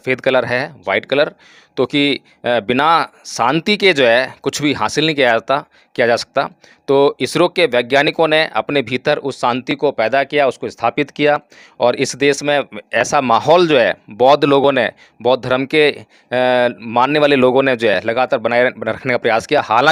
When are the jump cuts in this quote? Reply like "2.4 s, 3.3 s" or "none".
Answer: none